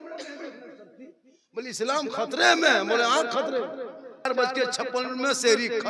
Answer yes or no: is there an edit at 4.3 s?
yes